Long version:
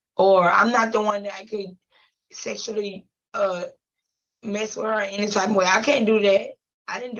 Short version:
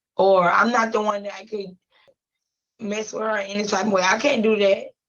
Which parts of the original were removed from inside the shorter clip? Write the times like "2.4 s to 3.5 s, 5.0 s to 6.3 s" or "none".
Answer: 2.2 s to 3.9 s